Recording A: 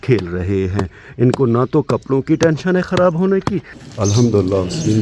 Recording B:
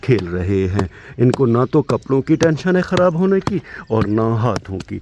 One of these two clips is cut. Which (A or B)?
A